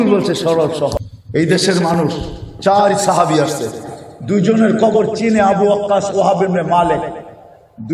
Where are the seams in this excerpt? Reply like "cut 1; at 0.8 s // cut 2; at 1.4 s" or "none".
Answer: cut 1; at 1.1 s